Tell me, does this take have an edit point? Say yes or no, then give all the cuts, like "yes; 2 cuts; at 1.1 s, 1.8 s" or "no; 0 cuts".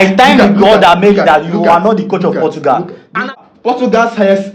yes; 1 cut; at 3.3 s